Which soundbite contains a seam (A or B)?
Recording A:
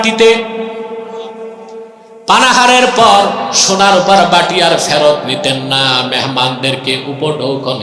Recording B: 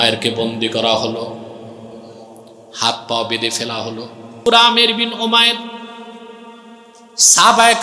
B